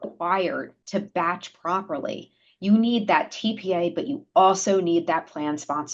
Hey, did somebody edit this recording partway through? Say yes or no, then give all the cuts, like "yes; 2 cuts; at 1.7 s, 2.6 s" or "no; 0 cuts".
no; 0 cuts